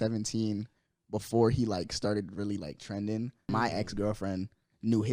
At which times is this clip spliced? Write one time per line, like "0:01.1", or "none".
0:03.5